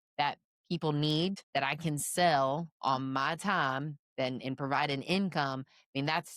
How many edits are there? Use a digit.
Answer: 1